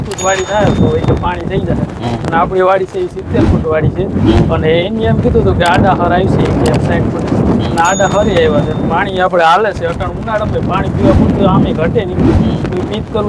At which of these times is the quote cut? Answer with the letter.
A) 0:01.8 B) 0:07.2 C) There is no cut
C